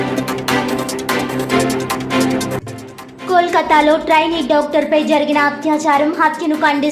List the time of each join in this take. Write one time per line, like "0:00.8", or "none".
0:02.5

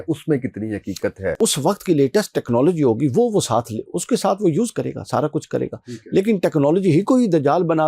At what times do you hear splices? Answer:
0:01.4

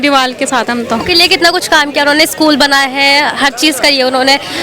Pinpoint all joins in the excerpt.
0:01.0

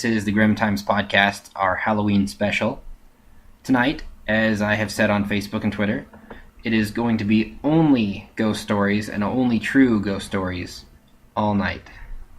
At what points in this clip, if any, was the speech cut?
0:05.4

